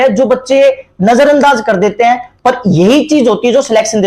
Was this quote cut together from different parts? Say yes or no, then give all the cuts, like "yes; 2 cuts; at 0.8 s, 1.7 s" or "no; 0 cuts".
no; 0 cuts